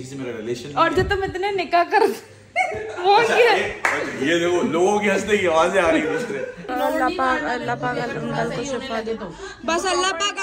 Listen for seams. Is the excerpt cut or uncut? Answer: cut